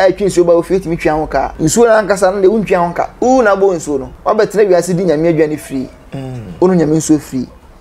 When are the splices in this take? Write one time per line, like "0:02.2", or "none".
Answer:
0:01.5
0:03.1
0:04.1